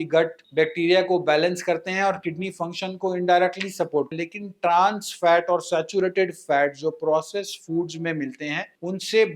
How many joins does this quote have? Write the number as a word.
one